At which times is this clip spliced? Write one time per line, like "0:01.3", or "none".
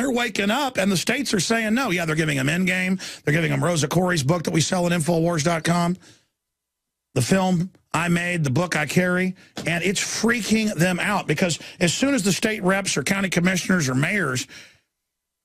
0:02.0